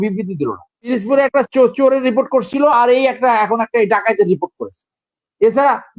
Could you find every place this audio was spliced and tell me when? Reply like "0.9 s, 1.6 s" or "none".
0.9 s